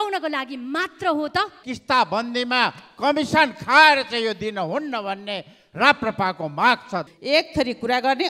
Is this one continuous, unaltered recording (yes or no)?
no